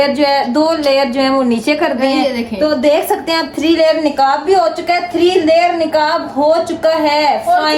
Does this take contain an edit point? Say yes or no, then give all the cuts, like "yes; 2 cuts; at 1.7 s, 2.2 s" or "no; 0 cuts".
no; 0 cuts